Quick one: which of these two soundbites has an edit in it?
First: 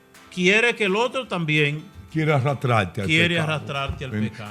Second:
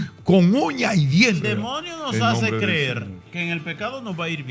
second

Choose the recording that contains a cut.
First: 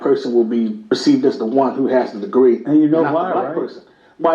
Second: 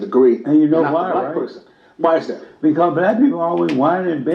first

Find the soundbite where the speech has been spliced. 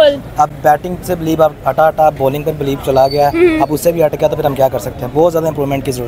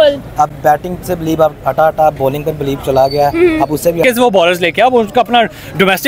second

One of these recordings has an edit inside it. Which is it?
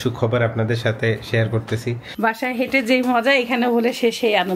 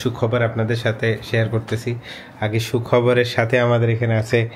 first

